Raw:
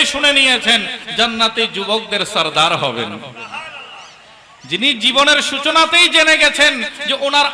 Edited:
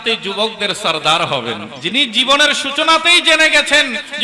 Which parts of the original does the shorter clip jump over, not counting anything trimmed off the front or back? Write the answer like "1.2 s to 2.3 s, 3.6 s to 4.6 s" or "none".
3.2 s to 4.6 s